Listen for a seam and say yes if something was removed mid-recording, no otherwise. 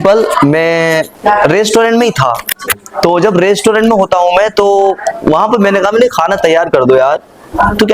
yes